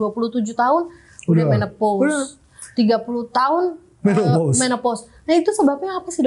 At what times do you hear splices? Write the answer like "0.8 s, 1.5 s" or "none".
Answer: none